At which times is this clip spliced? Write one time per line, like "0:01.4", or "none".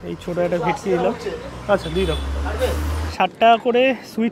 0:03.1